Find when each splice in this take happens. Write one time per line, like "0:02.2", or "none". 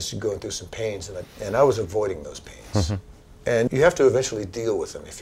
0:03.7